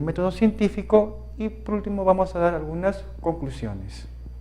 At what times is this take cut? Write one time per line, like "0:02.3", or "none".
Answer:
0:03.5